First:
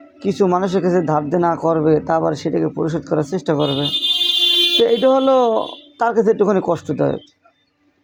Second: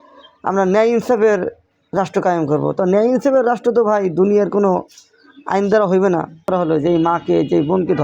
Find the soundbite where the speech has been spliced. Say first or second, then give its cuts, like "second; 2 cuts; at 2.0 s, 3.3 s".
second; 1 cut; at 6.5 s